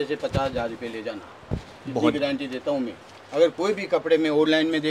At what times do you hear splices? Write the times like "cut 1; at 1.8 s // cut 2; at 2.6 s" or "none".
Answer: none